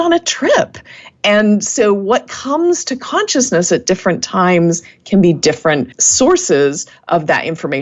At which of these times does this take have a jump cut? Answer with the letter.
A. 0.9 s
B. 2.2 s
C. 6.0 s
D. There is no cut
C